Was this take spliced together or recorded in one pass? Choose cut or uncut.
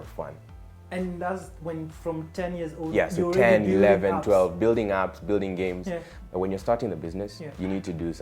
cut